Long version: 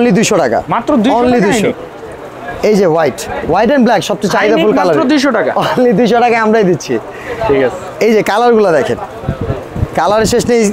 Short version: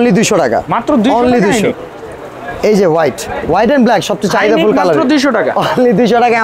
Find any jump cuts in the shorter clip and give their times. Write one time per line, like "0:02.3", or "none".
none